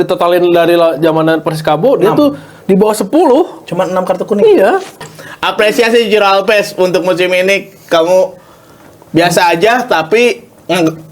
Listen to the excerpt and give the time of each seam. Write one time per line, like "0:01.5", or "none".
0:05.0